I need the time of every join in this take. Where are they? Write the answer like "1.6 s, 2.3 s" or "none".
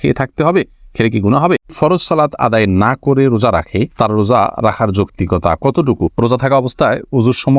1.8 s, 6.1 s